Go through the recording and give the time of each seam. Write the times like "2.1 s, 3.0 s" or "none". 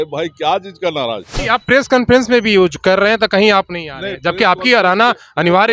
1.4 s

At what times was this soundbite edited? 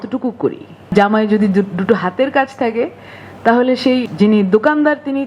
0.9 s, 4.0 s

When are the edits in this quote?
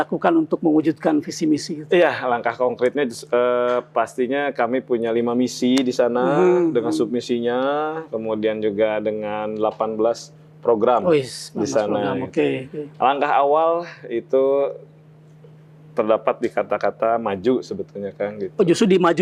none

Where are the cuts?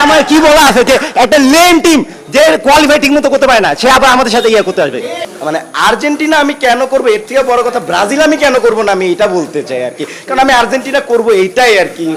5.3 s

